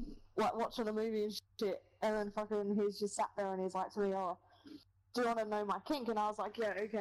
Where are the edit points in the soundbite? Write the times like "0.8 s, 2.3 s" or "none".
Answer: none